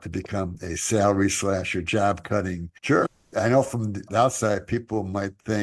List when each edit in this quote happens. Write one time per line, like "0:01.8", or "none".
0:03.2